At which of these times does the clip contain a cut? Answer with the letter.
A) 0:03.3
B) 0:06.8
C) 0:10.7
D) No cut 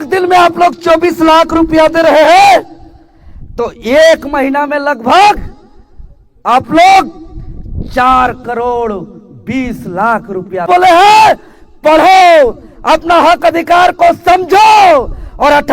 C